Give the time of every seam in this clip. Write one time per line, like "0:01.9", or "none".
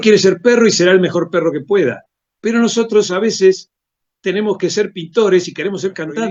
none